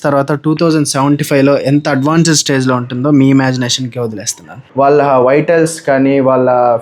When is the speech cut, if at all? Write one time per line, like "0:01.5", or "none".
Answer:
0:04.6